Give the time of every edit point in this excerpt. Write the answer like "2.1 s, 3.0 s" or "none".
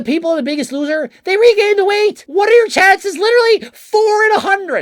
2.2 s